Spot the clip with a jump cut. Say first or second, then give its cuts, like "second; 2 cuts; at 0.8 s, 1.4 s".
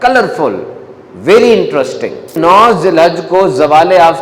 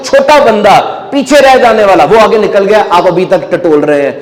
first; 1 cut; at 2.4 s